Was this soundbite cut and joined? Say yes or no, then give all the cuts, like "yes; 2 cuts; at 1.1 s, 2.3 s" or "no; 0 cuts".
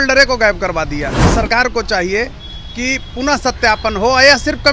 yes; 1 cut; at 1.2 s